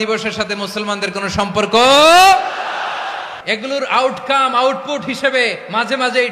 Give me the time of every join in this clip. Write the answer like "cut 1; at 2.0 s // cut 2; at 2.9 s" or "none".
cut 1; at 3.3 s